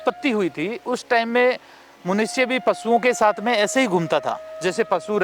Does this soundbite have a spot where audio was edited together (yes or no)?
no